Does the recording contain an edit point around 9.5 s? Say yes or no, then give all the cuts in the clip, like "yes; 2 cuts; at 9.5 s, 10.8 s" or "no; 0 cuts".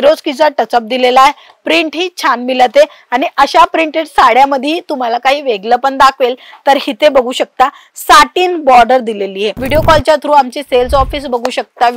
yes; 1 cut; at 9.5 s